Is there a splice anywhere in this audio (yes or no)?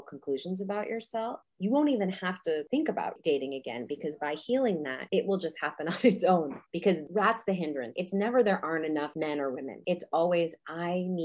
yes